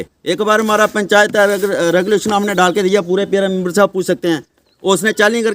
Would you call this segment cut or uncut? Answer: uncut